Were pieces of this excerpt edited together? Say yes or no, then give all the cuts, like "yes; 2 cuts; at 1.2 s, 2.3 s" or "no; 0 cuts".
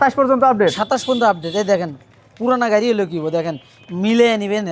no; 0 cuts